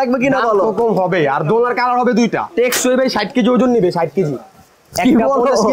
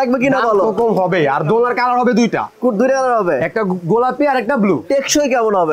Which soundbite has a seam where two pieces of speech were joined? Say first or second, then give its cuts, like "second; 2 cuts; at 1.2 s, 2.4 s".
first; 1 cut; at 2.5 s